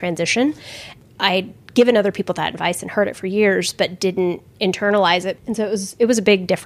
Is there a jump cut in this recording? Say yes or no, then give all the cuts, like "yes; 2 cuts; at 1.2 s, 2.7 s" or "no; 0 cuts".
yes; 1 cut; at 5.4 s